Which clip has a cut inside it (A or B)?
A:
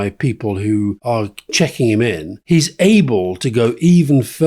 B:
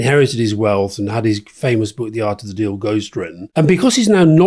A